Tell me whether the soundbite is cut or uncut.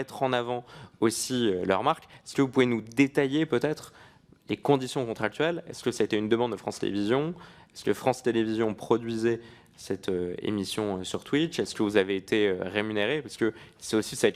uncut